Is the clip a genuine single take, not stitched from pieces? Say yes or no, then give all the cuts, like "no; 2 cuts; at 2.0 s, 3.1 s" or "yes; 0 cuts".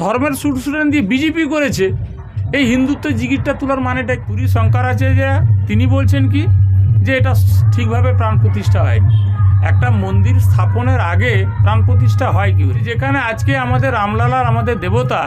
no; 2 cuts; at 4.3 s, 12.8 s